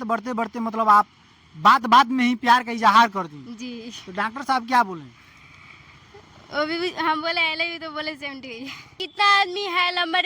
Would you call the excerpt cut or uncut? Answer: cut